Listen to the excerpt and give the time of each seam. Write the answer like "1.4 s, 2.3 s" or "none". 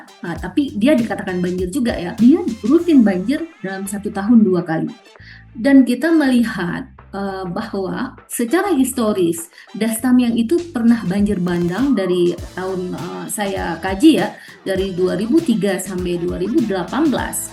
2.2 s